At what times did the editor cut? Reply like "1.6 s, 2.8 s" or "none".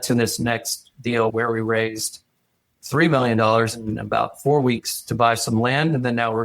1.3 s